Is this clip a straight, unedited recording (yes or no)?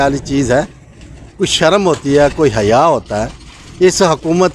yes